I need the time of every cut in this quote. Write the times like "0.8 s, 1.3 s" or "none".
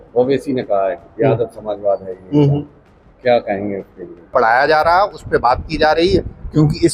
4.3 s